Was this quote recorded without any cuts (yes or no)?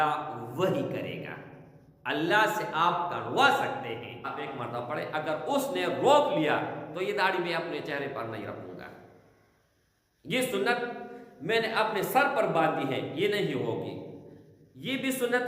no